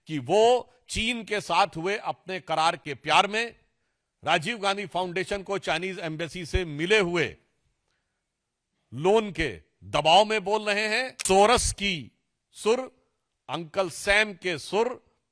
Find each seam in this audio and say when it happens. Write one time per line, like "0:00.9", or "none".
0:11.1